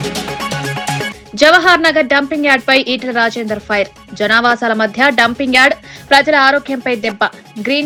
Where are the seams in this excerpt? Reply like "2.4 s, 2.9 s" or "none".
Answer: none